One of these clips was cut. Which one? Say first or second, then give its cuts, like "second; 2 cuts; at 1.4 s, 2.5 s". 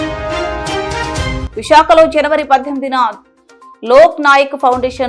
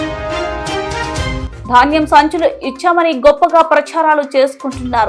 first; 1 cut; at 1.4 s